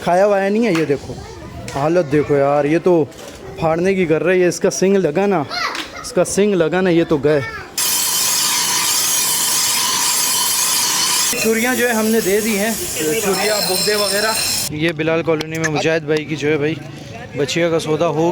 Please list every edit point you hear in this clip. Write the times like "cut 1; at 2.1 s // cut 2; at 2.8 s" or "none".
cut 1; at 7.8 s // cut 2; at 14.7 s